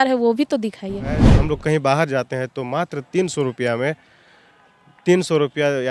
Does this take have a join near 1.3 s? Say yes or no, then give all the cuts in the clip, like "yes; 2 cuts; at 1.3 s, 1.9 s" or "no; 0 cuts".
yes; 1 cut; at 1.3 s